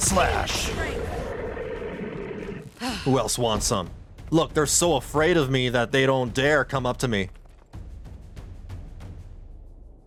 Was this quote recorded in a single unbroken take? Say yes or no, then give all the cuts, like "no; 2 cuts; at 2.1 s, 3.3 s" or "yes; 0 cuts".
yes; 0 cuts